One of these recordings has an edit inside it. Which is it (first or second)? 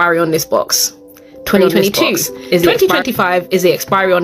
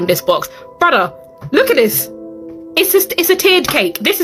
first